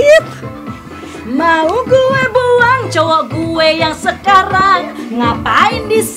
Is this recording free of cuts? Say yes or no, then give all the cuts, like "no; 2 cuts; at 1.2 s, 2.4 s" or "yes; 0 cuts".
yes; 0 cuts